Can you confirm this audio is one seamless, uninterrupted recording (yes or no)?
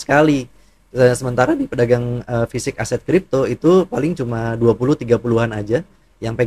yes